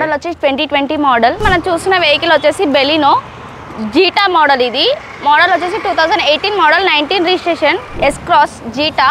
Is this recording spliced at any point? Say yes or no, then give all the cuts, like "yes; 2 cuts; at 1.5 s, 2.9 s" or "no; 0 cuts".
yes; 2 cuts; at 1.4 s, 7.9 s